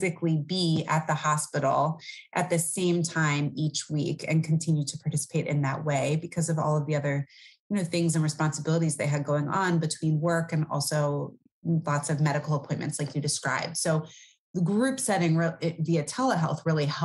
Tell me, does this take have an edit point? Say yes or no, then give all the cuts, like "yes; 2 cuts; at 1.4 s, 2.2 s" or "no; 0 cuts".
no; 0 cuts